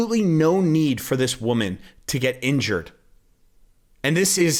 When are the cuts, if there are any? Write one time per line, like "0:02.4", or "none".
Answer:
none